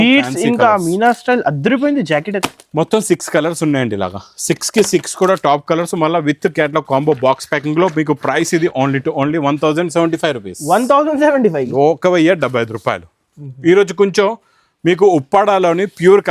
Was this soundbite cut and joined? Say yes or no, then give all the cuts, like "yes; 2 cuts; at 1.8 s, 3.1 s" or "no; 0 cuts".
no; 0 cuts